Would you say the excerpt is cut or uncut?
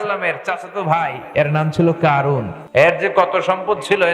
cut